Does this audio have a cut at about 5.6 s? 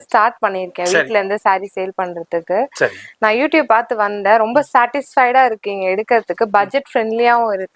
no; 0 cuts

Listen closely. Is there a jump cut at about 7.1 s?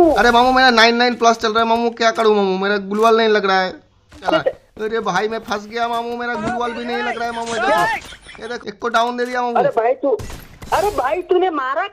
no; 2 cuts; at 4.2 s, 8.5 s

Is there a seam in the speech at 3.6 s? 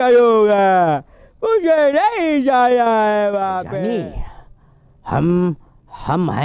yes; 1 cut; at 3.6 s

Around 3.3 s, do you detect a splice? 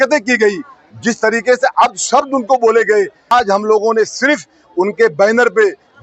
yes; 1 cut; at 3.3 s

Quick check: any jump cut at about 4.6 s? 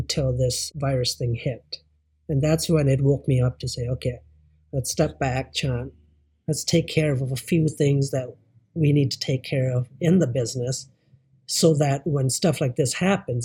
no; 0 cuts

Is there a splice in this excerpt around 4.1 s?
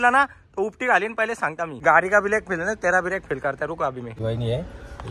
yes; 2 cuts; at 1.8 s, 4.1 s

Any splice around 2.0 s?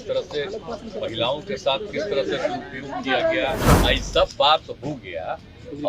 no; 1 cut; at 3.8 s

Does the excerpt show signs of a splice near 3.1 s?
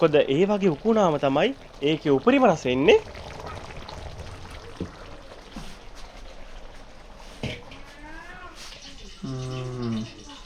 yes; 1 cut; at 3.1 s

